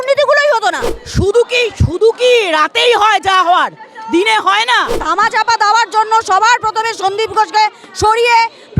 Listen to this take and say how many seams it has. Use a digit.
2